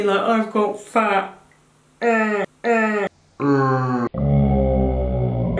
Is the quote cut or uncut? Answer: uncut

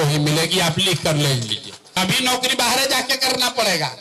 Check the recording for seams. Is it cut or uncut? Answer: cut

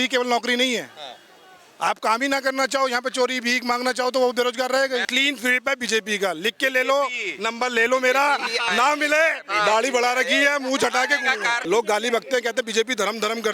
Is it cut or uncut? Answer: cut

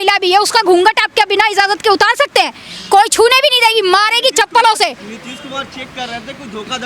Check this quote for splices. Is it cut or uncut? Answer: uncut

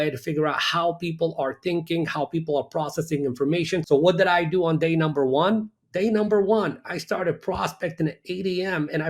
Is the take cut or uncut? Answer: cut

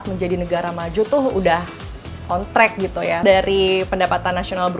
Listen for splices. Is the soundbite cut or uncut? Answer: cut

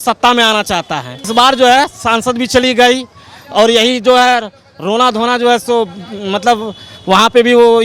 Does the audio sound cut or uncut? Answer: cut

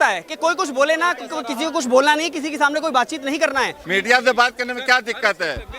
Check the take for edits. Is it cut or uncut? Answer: cut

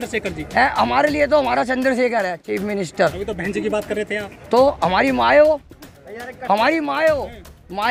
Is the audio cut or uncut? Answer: uncut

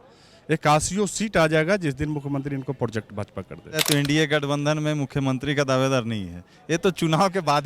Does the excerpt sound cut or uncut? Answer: cut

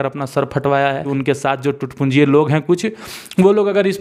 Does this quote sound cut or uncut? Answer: cut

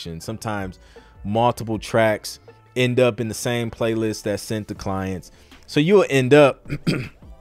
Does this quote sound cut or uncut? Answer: uncut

